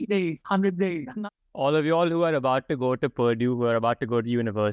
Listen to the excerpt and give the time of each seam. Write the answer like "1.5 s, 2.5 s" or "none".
1.1 s